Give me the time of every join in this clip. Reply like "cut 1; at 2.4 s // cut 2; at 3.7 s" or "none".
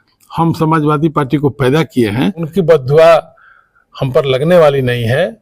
cut 1; at 2.5 s